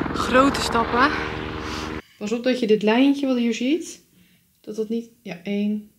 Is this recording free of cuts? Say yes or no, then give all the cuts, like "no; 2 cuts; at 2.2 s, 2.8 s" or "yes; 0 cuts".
no; 1 cut; at 2.0 s